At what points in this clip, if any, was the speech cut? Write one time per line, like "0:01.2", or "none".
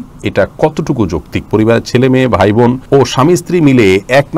0:01.5
0:02.8

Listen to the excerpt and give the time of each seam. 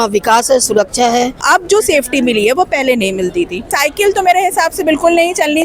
0:01.4
0:03.7

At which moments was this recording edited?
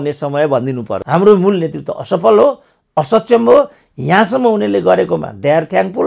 0:00.9

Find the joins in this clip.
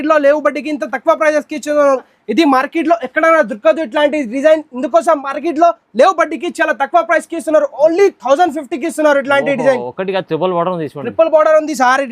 0:02.1

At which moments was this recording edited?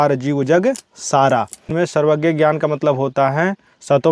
0:01.6

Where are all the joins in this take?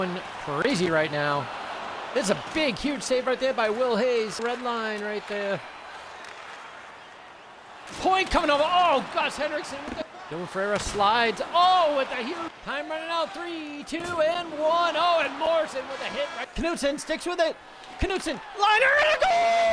0:04.4
0:10.1
0:12.5
0:16.4

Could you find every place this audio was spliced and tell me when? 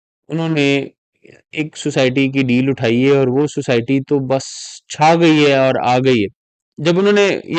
0:06.7

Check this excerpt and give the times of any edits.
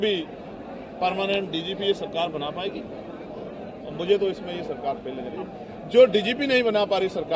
none

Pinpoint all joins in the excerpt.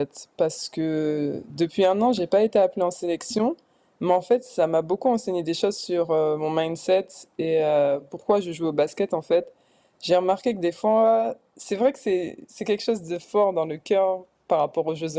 none

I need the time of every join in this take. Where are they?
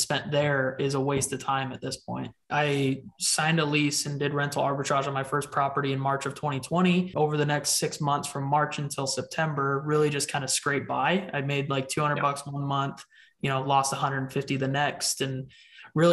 0:02.4
0:07.1

